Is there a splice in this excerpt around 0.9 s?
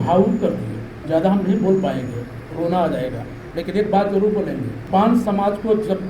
yes; 3 cuts; at 0.9 s, 3.3 s, 4.8 s

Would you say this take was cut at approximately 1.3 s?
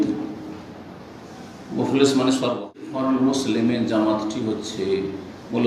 no; 1 cut; at 2.9 s

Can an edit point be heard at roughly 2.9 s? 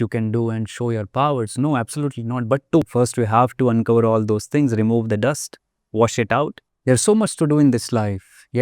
yes; 2 cuts; at 2.9 s, 6.7 s

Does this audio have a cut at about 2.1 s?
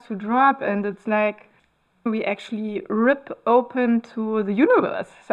yes; 1 cut; at 2.1 s

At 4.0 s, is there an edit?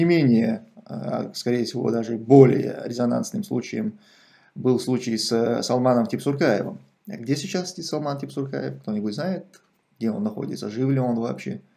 no; 0 cuts

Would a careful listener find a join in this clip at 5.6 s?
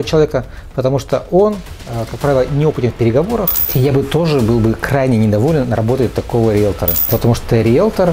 no; 2 cuts; at 3.7 s, 6.9 s

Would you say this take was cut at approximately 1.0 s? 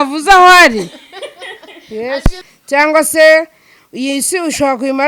no; 1 cut; at 2.5 s

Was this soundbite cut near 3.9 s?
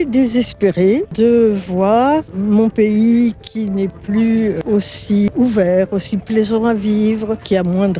no; 2 cuts; at 1.1 s, 5.3 s

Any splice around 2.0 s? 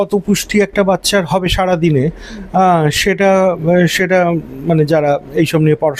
no; 0 cuts

